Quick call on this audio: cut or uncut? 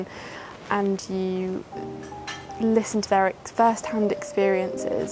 uncut